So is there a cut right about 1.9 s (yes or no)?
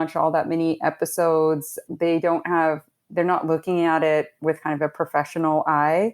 yes